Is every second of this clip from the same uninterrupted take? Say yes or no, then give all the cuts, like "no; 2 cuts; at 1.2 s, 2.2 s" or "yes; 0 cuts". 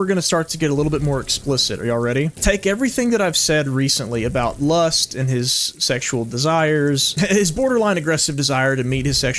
yes; 0 cuts